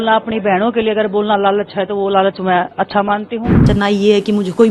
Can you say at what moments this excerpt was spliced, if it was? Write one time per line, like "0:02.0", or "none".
0:03.7